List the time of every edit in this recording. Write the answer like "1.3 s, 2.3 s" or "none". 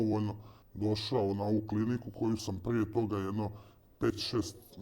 none

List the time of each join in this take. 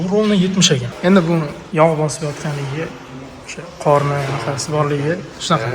0.9 s, 1.6 s

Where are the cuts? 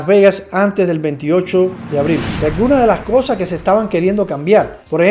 2.3 s

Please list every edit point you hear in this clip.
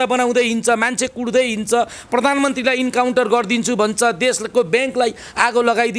none

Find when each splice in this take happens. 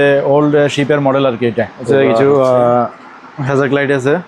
1.8 s

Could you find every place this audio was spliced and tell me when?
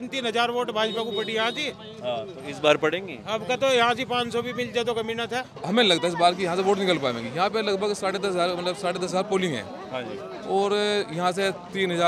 5.5 s

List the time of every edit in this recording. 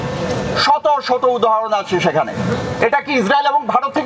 2.7 s

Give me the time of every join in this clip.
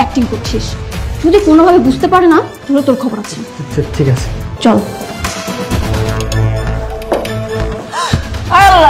4.4 s, 5.9 s, 7.8 s

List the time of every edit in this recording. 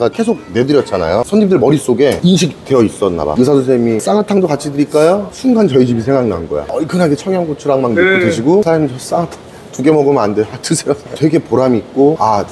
1.2 s, 3.3 s, 6.6 s, 11.2 s

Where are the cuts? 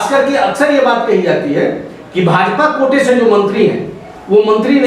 none

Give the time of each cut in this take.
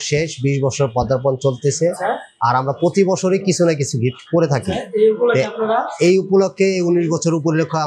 none

